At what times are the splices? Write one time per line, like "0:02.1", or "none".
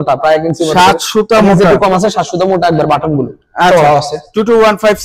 none